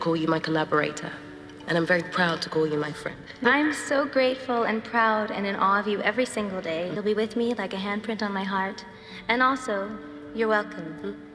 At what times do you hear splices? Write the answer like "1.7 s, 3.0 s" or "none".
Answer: 3.3 s, 6.9 s